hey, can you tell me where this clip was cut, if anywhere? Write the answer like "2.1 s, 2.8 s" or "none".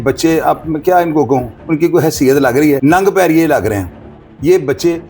2.8 s